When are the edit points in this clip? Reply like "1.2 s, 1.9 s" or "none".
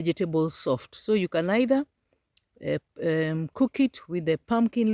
none